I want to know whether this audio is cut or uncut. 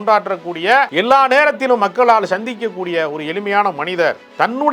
cut